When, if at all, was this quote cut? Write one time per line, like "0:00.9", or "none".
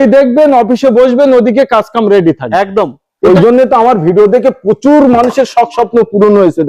0:03.3